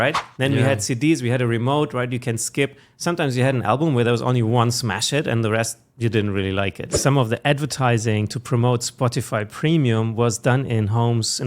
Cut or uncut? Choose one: cut